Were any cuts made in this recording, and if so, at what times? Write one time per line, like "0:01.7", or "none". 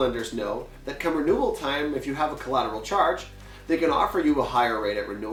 none